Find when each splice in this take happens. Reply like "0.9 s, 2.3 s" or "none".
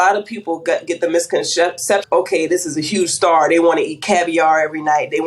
2.0 s